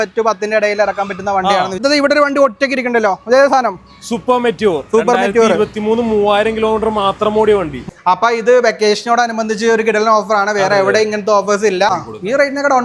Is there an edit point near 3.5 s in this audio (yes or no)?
no